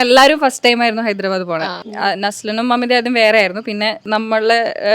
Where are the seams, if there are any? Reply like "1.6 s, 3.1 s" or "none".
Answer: 1.8 s, 4.0 s